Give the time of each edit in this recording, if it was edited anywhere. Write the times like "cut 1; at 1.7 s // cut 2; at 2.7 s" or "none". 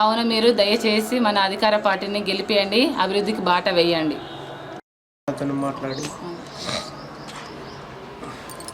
cut 1; at 5.1 s